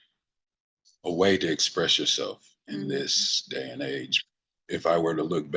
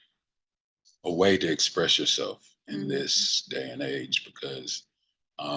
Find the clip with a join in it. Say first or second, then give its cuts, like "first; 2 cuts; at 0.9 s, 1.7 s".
first; 1 cut; at 4.2 s